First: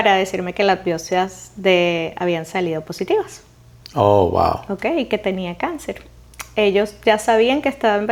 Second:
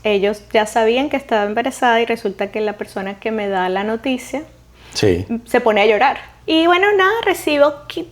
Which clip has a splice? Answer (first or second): second